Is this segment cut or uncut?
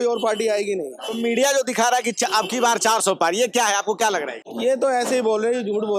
uncut